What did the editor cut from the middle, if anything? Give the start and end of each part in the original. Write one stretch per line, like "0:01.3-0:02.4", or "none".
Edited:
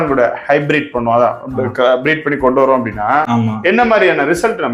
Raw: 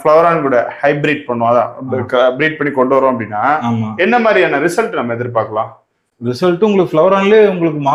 none